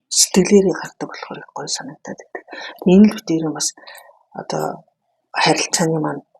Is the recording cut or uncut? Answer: uncut